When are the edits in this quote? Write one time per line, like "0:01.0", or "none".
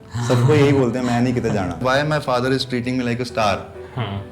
0:01.8